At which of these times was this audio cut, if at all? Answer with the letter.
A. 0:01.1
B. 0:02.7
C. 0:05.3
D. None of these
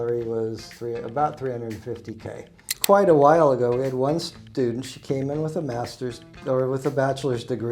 B